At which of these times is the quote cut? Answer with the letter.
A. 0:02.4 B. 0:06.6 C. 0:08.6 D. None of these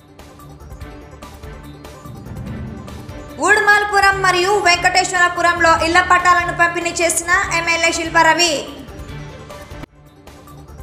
D